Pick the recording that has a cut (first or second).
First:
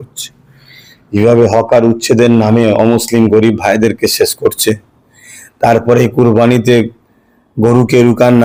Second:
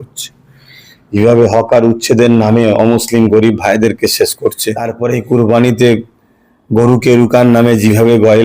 second